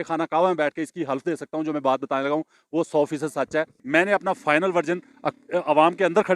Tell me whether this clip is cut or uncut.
cut